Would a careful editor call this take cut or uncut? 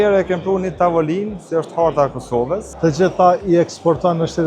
cut